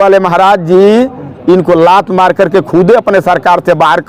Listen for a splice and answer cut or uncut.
uncut